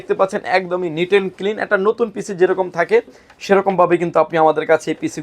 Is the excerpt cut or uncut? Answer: uncut